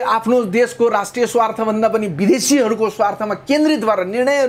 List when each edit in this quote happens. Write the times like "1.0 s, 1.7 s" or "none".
none